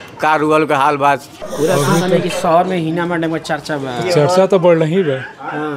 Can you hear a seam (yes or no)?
yes